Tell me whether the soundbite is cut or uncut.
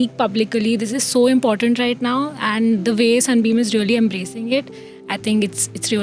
uncut